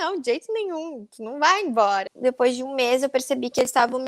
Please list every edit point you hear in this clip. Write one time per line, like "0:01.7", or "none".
0:02.1